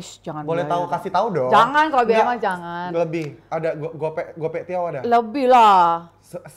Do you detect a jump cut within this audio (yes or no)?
no